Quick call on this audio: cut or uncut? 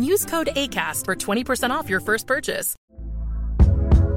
cut